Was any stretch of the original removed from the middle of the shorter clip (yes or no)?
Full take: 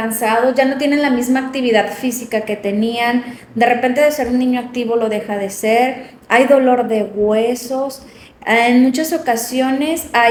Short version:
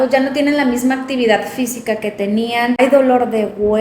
yes